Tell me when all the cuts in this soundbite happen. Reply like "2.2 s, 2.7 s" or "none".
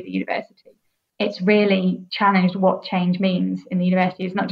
1.1 s, 2.1 s